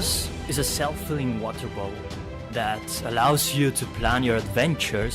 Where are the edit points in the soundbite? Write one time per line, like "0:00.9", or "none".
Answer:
0:02.3